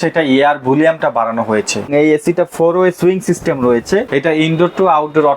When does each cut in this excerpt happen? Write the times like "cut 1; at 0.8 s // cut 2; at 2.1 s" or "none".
cut 1; at 1.9 s // cut 2; at 4.1 s